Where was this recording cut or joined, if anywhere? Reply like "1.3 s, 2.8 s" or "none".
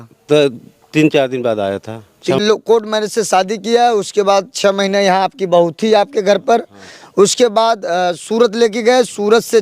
2.4 s